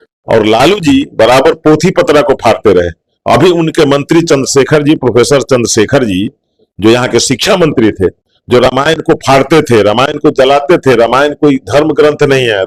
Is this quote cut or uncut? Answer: uncut